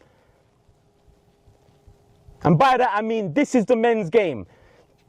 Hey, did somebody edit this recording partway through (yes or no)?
no